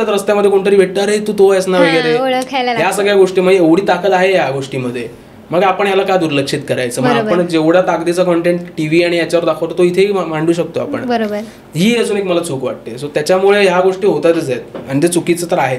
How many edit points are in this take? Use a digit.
0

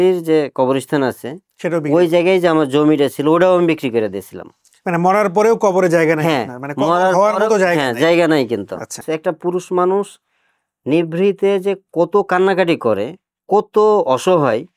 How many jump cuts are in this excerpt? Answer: 1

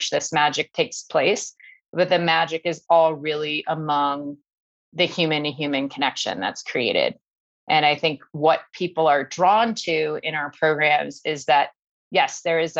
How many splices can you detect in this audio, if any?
0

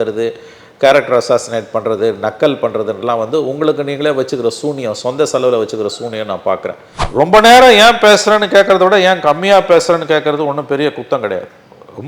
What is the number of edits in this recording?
1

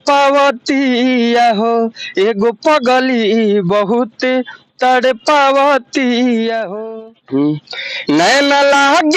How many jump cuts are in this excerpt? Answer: 1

